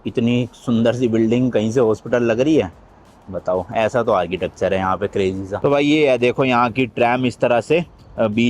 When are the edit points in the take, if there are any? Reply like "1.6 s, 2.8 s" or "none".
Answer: 5.6 s

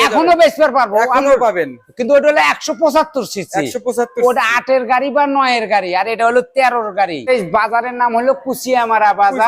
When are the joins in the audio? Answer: 7.3 s

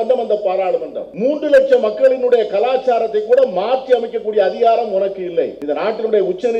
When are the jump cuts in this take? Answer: 1.0 s, 5.6 s

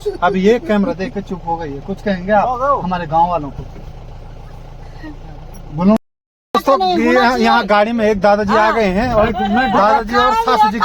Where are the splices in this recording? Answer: 6.0 s

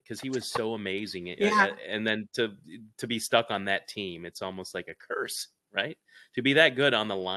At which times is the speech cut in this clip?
none

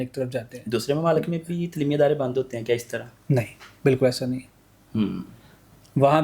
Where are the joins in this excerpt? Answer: none

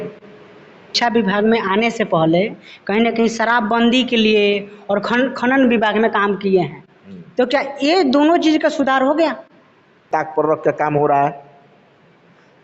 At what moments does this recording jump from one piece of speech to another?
0.9 s, 10.1 s

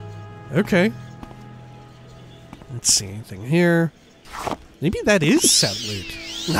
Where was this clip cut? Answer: 3.0 s

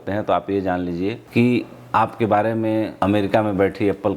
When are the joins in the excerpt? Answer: 1.2 s, 2.9 s

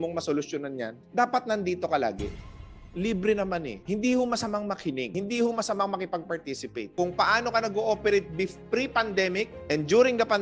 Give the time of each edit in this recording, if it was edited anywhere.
2.5 s, 3.8 s, 5.1 s, 6.8 s

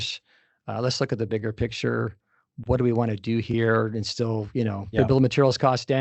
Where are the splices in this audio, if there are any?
5.0 s

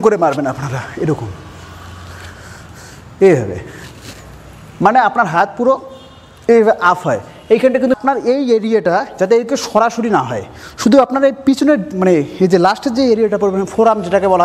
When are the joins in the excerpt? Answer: 7.9 s

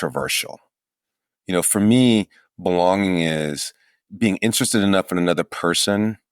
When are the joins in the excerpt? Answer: 4.0 s

